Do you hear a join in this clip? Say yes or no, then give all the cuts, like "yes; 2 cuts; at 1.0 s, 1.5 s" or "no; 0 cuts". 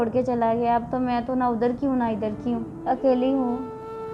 yes; 1 cut; at 2.7 s